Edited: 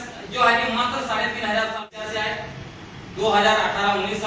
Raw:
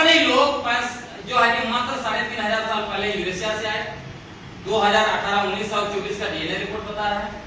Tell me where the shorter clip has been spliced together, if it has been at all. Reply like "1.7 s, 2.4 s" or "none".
1.9 s